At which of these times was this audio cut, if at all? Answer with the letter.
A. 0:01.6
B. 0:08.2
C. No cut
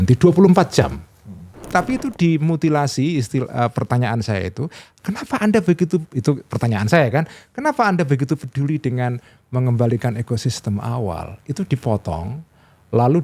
A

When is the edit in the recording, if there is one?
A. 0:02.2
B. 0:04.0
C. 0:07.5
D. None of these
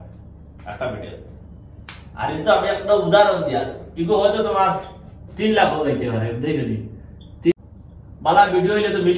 C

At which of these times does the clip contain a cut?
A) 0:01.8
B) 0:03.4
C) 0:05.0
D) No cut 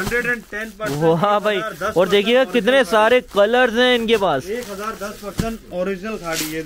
D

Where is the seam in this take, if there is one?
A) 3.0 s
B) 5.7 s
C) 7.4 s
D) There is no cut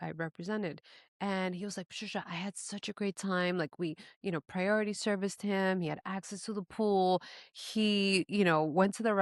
D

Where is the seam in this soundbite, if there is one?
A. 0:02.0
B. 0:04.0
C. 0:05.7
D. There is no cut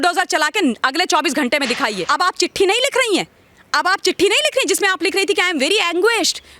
A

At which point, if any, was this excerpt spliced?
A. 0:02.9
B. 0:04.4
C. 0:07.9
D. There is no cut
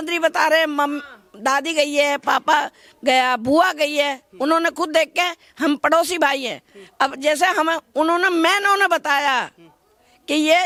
D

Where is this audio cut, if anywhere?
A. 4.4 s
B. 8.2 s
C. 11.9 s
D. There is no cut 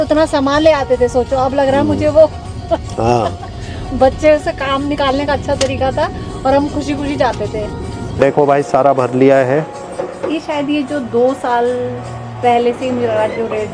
B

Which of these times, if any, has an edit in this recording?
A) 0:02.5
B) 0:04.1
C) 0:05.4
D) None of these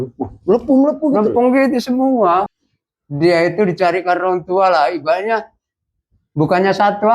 A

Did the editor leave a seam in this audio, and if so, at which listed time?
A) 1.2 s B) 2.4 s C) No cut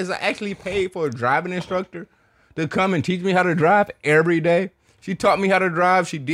C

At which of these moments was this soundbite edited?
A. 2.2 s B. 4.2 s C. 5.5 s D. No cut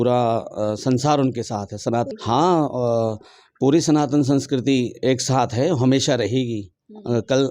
D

